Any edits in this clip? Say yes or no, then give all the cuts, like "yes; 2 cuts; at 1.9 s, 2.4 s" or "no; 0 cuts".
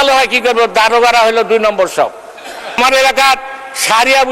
yes; 1 cut; at 2.8 s